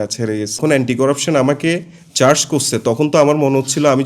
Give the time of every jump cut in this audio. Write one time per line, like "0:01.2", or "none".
0:00.9

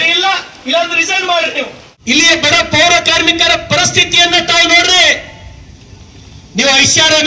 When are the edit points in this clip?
0:01.9

